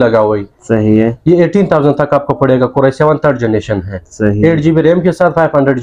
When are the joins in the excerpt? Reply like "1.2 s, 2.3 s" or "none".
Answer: none